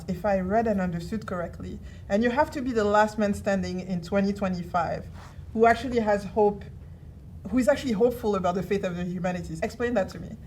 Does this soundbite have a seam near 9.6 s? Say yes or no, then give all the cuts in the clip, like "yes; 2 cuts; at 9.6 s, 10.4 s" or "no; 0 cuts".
yes; 1 cut; at 9.6 s